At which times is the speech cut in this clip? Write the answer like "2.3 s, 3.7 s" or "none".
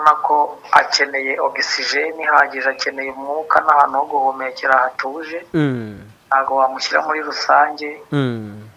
none